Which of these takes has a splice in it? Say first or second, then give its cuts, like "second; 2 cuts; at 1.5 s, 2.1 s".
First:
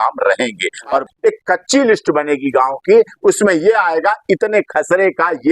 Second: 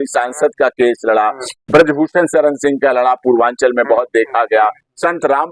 first; 1 cut; at 1.1 s